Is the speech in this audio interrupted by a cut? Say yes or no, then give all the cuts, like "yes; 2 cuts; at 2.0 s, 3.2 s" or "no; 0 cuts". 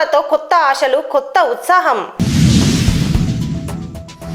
no; 0 cuts